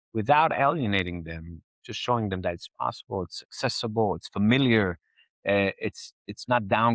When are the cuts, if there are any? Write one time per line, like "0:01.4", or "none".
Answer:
none